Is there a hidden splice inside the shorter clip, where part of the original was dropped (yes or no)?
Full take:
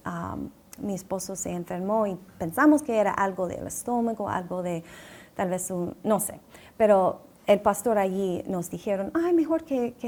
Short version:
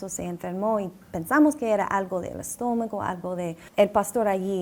yes